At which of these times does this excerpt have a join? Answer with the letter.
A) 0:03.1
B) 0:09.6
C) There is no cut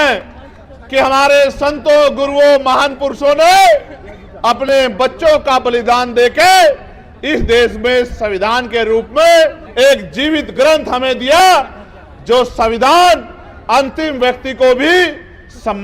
B